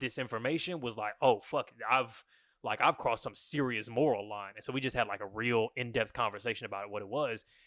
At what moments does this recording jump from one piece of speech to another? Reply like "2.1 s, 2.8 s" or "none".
none

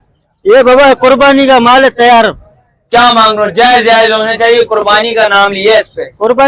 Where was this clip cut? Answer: none

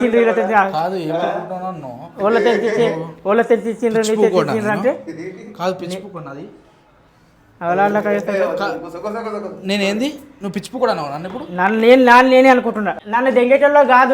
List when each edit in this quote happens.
12.9 s

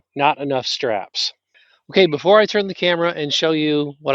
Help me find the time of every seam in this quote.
1.6 s

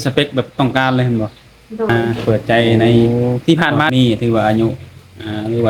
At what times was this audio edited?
1.9 s, 3.1 s, 3.9 s

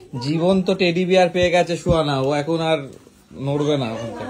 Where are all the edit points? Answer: none

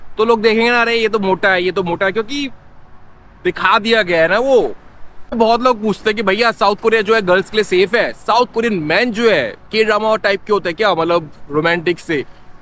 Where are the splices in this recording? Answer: 5.4 s

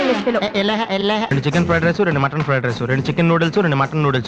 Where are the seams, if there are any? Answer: 1.3 s

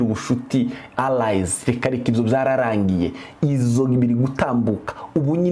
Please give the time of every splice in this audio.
none

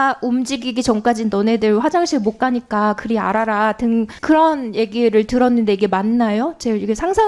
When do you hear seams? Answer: none

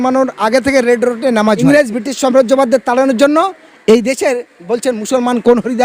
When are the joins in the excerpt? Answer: 1.6 s

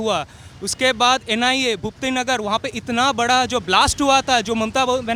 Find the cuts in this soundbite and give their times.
none

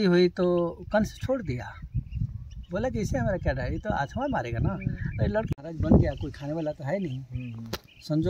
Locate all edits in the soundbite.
5.5 s

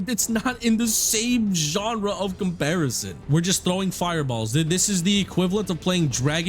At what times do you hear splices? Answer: 3.2 s

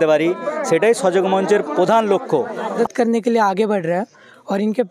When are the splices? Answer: 2.7 s

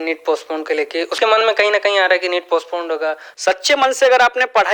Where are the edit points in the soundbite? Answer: 1.1 s, 3.3 s

